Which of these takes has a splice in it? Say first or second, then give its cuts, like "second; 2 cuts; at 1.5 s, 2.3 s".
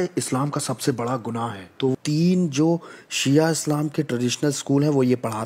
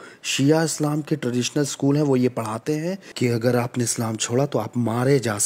first; 1 cut; at 1.9 s